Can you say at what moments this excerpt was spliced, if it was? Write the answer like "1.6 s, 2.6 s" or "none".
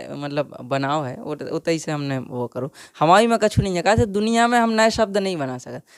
none